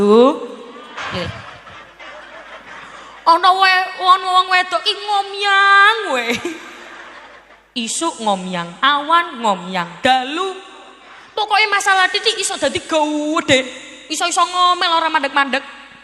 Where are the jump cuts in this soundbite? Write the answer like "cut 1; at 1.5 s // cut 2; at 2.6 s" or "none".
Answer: cut 1; at 1.3 s